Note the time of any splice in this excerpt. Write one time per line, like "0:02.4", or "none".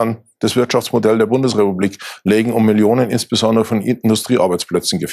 none